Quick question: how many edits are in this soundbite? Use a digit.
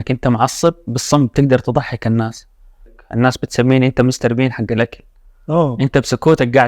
1